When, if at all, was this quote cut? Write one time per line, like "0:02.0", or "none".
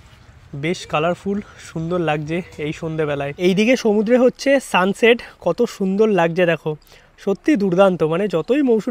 0:03.3